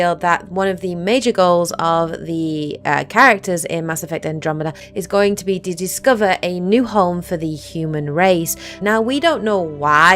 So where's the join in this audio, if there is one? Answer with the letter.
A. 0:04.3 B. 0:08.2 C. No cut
B